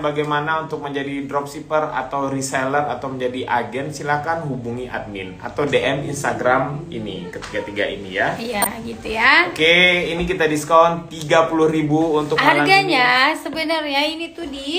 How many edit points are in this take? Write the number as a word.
zero